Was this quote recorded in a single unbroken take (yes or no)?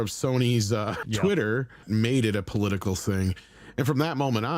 no